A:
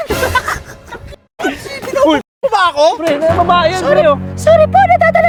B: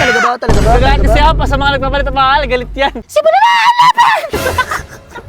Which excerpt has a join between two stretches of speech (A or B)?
B